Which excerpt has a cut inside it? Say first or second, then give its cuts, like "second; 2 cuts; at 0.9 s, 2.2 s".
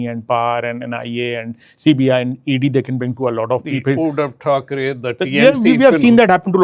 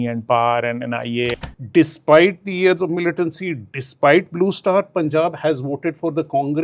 second; 1 cut; at 1.5 s